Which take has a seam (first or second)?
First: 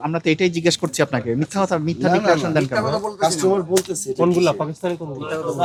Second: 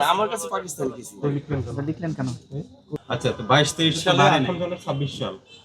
second